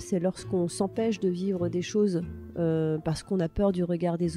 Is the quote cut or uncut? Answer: uncut